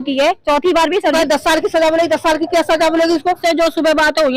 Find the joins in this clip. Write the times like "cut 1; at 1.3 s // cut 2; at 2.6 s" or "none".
cut 1; at 1.1 s // cut 2; at 3.4 s